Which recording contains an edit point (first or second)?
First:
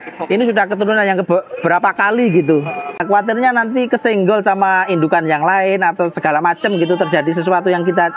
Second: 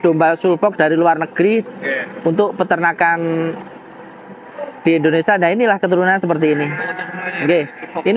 first